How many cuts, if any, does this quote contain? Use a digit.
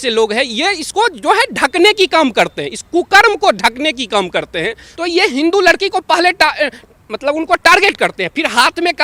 1